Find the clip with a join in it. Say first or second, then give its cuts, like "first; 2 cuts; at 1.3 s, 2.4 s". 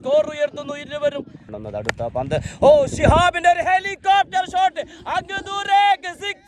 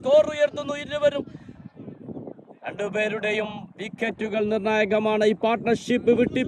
first; 1 cut; at 1.5 s